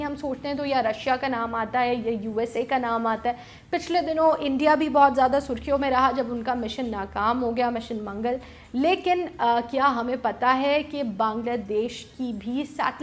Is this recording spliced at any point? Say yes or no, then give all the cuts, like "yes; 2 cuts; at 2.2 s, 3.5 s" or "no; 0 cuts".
no; 0 cuts